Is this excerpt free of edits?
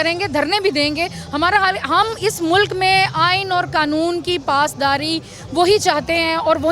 yes; 0 cuts

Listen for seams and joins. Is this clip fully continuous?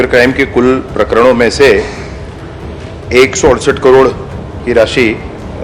yes; 0 cuts

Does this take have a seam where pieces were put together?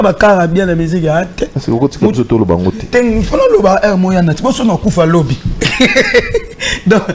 no; 0 cuts

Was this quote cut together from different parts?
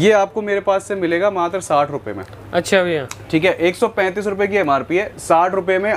no; 0 cuts

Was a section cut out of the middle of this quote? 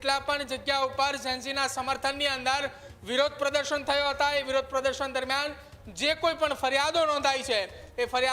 no; 0 cuts

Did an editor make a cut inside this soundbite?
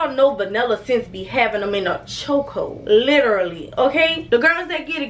no; 0 cuts

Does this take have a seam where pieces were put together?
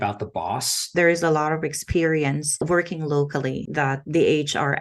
yes; 3 cuts; at 0.9 s, 2.6 s, 3.6 s

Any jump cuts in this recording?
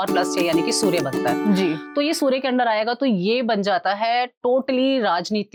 no; 0 cuts

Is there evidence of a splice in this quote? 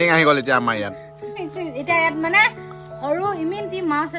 yes; 1 cut; at 1.3 s

